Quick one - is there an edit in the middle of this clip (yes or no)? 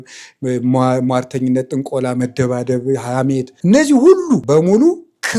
yes